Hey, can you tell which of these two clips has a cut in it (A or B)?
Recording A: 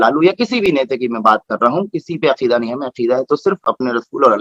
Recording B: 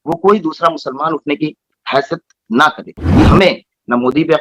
B